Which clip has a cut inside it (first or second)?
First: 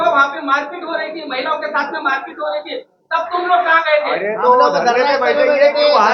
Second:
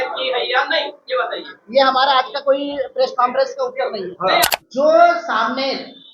second